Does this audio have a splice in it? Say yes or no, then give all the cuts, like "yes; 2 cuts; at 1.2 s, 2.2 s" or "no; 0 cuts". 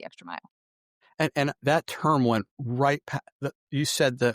yes; 1 cut; at 1.6 s